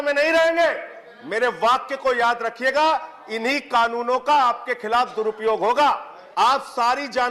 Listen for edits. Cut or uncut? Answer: cut